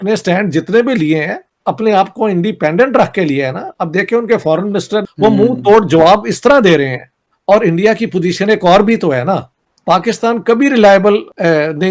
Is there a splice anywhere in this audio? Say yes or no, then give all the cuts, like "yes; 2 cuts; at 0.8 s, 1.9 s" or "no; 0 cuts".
yes; 2 cuts; at 5.0 s, 7.2 s